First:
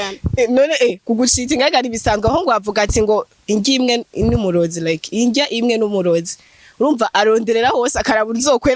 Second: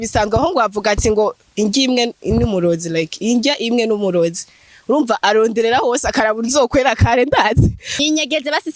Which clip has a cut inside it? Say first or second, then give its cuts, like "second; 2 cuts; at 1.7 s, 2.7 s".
second; 1 cut; at 7.9 s